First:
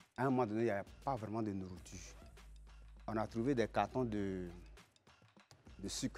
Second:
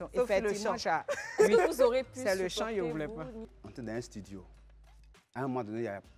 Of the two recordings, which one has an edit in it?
second; 1 cut; at 3.6 s

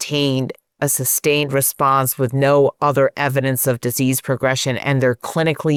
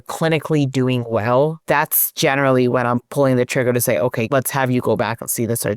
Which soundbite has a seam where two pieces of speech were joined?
second; 2 cuts; at 1.6 s, 4.2 s

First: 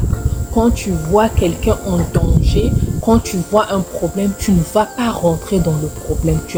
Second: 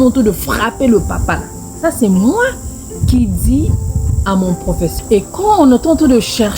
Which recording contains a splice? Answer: second; 1 cut; at 4.9 s

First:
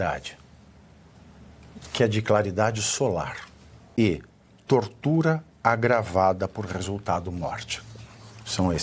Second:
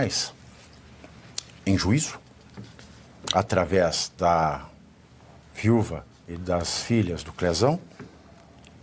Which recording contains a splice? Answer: first; 1 cut; at 3.9 s

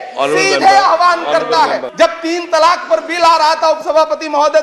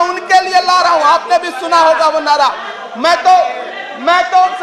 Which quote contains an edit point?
first; 1 cut; at 1.8 s

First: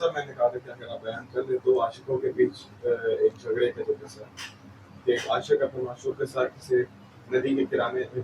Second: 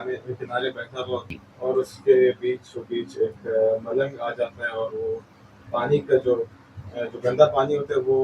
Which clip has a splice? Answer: second; 1 cut; at 1.4 s

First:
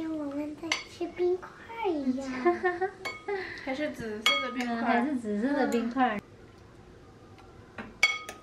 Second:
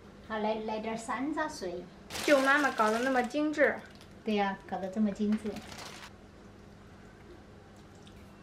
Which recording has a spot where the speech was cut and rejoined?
first; 1 cut; at 6.2 s

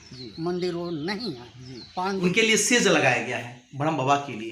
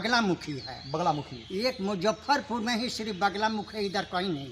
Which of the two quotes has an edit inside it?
first; 1 cut; at 2.2 s

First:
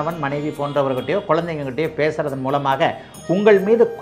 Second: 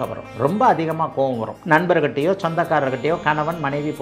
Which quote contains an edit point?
second; 1 cut; at 1.5 s

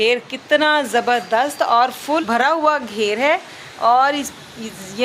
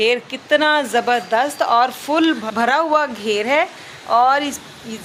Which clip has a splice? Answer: first; 1 cut; at 2.2 s

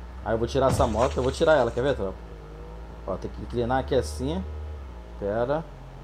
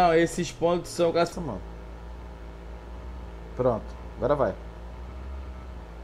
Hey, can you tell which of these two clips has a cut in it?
second; 1 cut; at 1.3 s

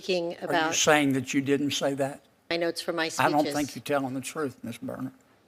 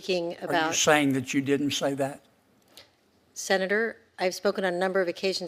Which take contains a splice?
first; 1 cut; at 2.5 s

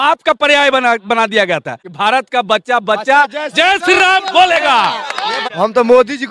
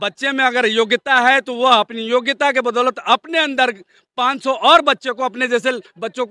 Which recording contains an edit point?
first; 2 cuts; at 1.8 s, 5.4 s

